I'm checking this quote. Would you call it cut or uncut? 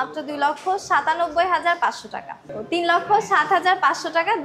cut